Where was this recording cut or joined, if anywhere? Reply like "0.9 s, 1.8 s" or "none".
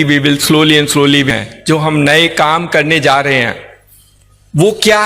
1.3 s